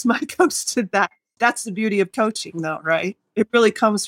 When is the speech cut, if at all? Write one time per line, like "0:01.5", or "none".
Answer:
0:01.2
0:03.2